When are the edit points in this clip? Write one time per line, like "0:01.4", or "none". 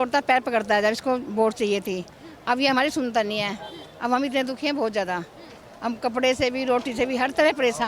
none